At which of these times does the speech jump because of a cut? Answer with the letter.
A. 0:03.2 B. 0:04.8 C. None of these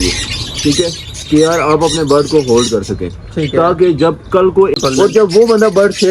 B